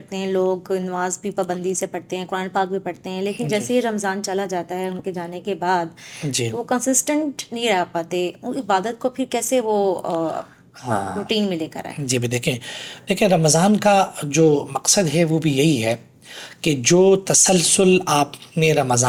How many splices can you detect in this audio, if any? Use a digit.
0